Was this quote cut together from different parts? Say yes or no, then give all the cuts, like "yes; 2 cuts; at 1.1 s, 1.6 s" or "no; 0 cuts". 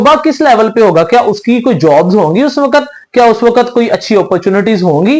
no; 0 cuts